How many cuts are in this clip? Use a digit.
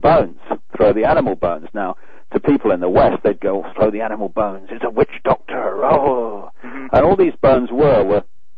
1